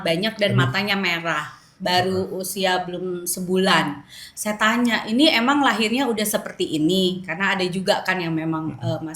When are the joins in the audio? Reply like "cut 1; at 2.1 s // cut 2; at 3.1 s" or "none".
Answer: none